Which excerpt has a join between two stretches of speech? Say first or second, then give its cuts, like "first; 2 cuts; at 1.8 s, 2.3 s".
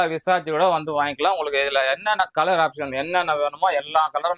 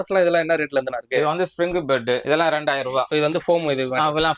second; 2 cuts; at 2.2 s, 3.1 s